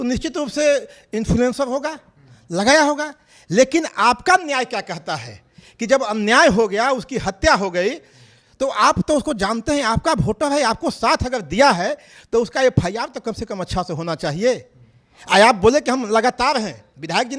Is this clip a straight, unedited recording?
yes; 0 cuts

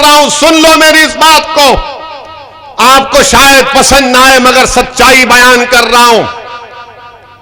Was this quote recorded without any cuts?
yes; 0 cuts

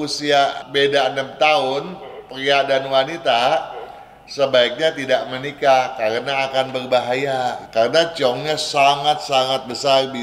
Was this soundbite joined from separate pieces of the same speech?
yes; 1 cut; at 7.6 s

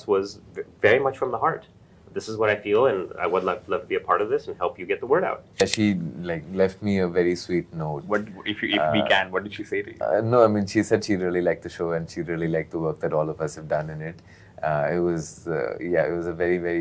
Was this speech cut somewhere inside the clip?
yes; 1 cut; at 5.6 s

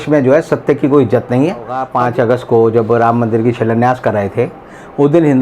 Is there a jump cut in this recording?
yes; 1 cut; at 1.8 s

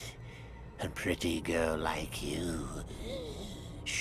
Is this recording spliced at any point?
no; 0 cuts

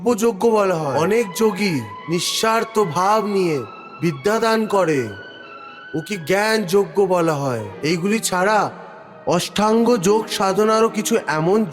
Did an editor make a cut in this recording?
yes; 2 cuts; at 0.9 s, 7.7 s

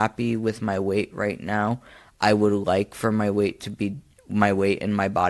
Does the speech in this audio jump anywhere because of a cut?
no; 0 cuts

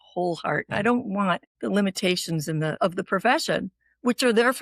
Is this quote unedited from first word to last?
no; 2 cuts; at 1.5 s, 2.8 s

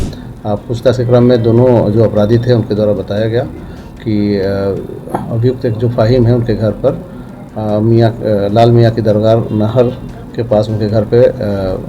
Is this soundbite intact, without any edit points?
yes; 0 cuts

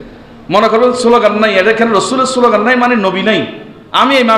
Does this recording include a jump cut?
no; 0 cuts

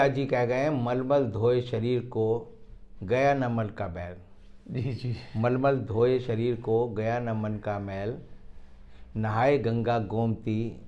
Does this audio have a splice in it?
no; 0 cuts

